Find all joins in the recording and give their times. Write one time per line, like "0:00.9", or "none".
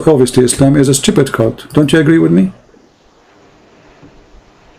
none